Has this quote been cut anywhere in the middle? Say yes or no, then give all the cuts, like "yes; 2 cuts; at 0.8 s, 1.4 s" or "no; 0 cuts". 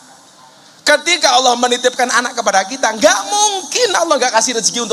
no; 0 cuts